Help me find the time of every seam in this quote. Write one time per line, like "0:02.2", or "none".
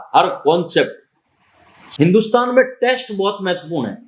0:01.8